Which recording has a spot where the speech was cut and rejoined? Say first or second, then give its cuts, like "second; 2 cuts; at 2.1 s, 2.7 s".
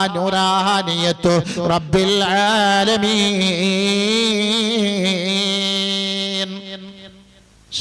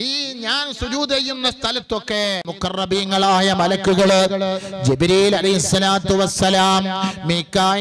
second; 1 cut; at 2.5 s